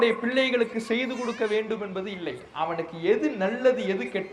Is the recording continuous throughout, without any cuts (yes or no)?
yes